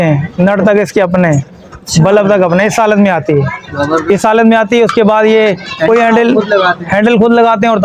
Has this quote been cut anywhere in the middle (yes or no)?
no